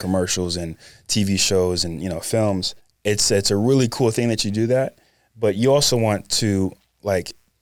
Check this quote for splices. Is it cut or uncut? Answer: uncut